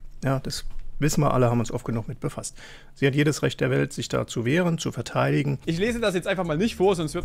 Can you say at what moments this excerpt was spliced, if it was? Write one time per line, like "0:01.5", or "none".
0:05.6